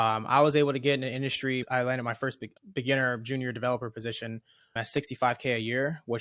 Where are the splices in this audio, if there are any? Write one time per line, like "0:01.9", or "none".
0:01.6
0:02.5
0:04.7